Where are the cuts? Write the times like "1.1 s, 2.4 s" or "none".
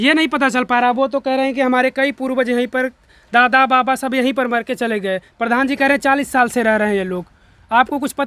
none